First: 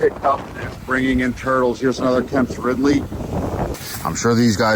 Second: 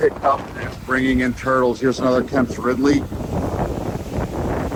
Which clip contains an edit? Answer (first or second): first